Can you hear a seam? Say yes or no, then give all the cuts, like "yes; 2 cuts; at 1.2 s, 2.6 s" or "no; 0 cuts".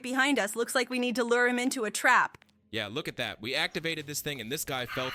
no; 0 cuts